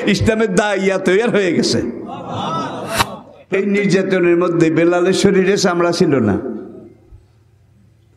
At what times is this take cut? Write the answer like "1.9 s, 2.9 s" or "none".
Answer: 3.3 s